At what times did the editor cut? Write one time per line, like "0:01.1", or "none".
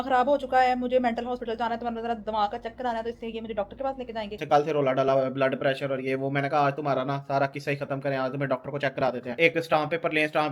0:04.4
0:09.4